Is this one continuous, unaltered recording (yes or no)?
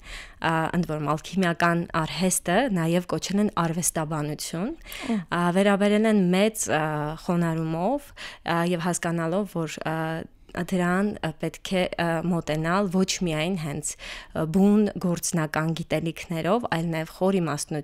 yes